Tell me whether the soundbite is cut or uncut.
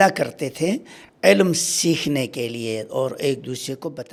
uncut